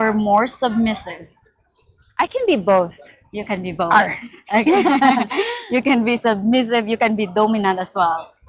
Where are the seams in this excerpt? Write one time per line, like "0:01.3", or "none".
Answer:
none